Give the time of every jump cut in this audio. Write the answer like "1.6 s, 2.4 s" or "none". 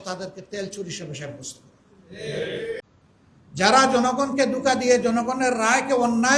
2.8 s